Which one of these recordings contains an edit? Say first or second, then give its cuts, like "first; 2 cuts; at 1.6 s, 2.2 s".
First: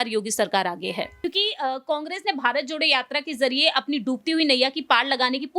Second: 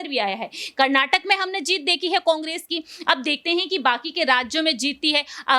first; 1 cut; at 1.1 s